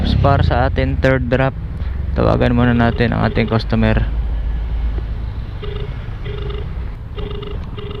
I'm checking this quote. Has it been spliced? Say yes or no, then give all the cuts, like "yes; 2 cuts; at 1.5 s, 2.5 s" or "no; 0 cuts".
no; 0 cuts